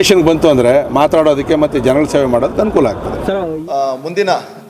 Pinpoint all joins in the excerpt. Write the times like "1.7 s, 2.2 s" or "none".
3.4 s